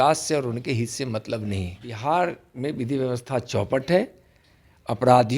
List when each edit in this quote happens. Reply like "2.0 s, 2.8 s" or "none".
1.9 s

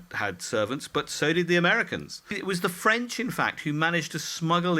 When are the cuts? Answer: 2.4 s

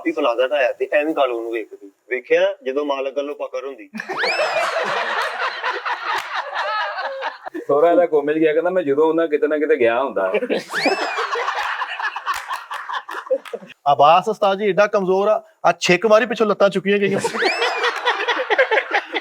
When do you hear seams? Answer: 7.5 s, 13.6 s

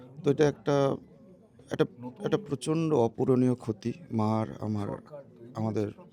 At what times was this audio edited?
none

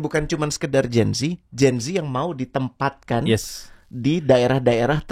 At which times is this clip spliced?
none

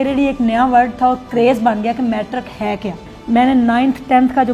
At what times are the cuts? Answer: 3.1 s

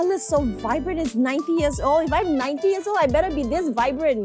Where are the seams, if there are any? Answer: none

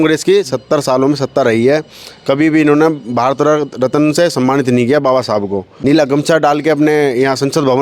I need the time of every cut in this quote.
5.7 s

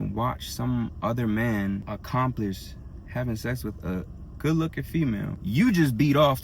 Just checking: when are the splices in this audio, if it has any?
1.8 s, 5.3 s

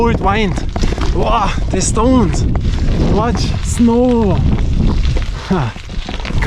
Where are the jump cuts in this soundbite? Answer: none

